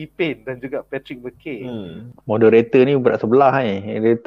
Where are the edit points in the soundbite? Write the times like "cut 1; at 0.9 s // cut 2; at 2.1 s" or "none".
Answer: cut 1; at 2.1 s